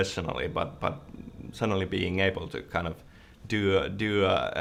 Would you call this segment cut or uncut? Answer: uncut